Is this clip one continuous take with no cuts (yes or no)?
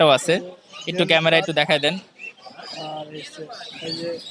yes